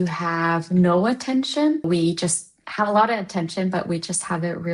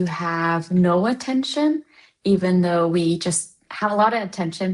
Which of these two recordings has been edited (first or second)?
first